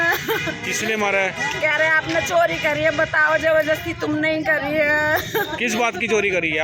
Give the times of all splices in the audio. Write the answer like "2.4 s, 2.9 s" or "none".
none